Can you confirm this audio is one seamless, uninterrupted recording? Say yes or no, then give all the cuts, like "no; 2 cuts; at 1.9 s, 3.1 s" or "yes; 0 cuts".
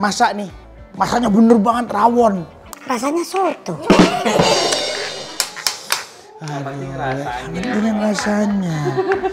yes; 0 cuts